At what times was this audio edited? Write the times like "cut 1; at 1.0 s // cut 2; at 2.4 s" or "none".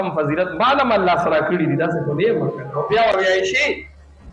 cut 1; at 3.1 s